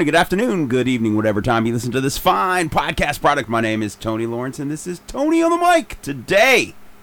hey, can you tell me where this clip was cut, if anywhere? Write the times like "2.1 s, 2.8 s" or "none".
none